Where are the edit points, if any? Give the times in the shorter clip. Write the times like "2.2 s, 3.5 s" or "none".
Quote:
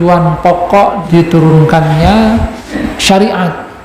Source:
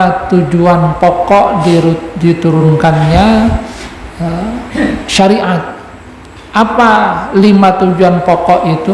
1.0 s, 2.8 s

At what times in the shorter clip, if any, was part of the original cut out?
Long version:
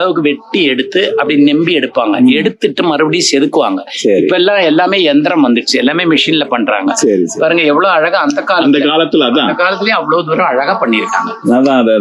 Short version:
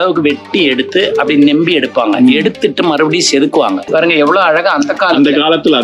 3.9 s

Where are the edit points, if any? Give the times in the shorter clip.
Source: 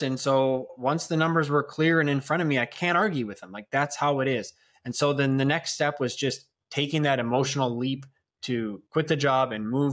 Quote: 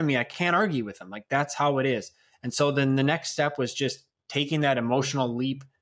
none

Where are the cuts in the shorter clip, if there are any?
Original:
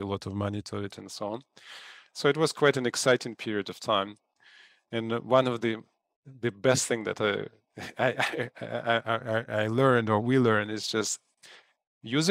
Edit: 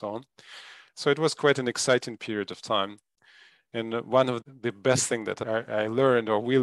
4.4 s, 5.4 s

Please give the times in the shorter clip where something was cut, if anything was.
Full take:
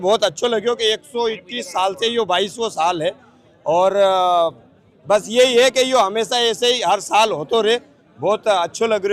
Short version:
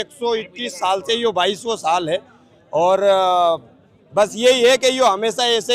none

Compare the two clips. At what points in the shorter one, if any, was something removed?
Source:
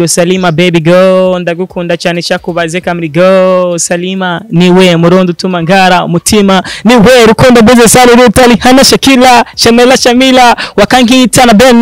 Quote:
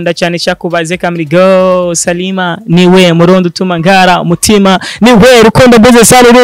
none

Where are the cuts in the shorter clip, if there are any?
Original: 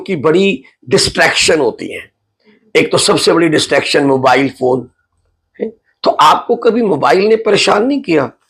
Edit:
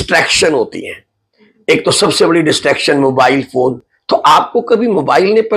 3.9 s

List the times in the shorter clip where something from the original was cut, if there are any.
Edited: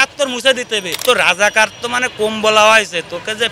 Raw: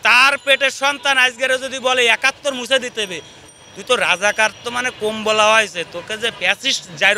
0.9 s

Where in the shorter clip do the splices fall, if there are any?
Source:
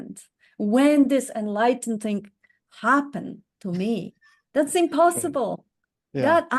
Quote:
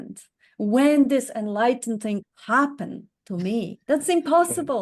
2.3 s, 3.8 s

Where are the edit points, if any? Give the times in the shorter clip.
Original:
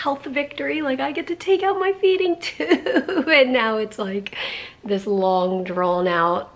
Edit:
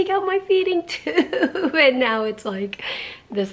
none

